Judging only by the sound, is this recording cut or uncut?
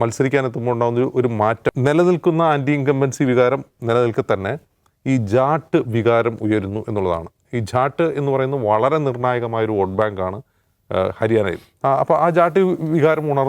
cut